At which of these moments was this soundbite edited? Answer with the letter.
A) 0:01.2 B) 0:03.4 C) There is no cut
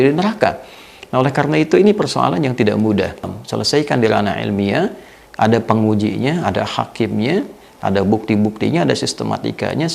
B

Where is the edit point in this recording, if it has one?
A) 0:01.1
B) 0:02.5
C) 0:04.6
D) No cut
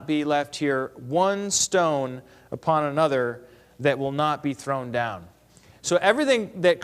C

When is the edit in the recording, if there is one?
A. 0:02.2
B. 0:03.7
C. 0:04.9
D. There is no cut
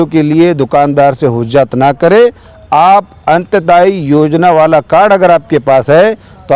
D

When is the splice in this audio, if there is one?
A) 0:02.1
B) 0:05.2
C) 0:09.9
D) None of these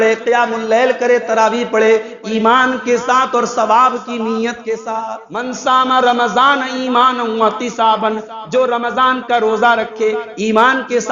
B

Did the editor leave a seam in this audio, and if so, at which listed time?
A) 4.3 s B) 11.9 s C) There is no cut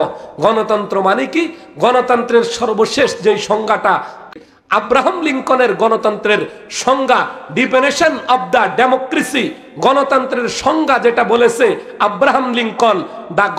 A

